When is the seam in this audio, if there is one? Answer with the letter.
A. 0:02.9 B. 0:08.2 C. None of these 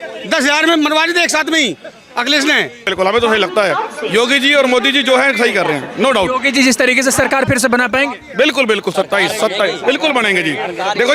A